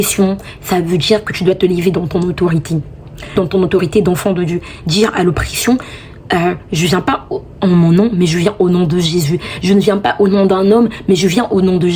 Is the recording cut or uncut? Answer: cut